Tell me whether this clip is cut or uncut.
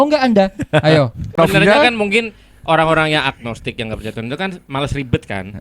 cut